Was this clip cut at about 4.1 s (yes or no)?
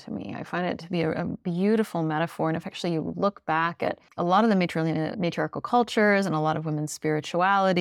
yes